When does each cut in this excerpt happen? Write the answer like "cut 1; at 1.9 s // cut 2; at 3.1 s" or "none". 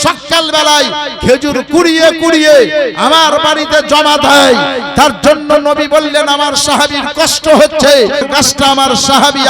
cut 1; at 8.2 s